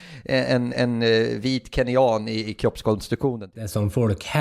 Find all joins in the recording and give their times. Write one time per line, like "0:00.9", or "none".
0:03.5